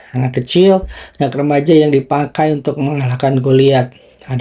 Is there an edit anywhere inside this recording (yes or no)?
no